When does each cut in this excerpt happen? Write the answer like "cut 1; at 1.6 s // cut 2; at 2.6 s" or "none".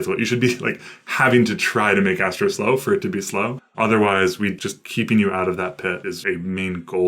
cut 1; at 3.6 s // cut 2; at 4.6 s // cut 3; at 6.2 s